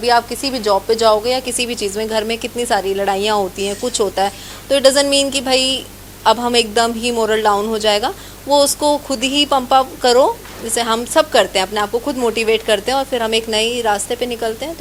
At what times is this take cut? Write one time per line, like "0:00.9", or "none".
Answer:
none